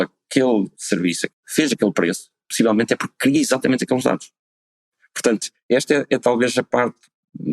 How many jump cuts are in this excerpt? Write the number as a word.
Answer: one